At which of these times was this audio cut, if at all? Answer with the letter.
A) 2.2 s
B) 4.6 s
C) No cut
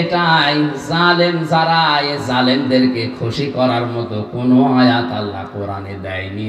C